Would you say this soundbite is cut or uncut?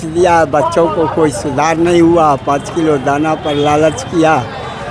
uncut